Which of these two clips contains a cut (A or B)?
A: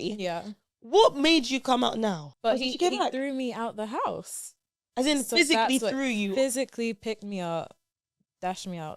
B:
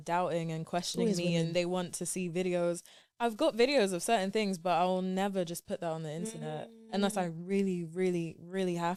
A